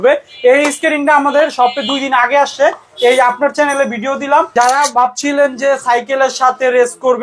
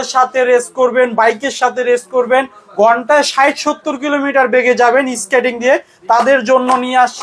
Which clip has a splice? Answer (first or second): first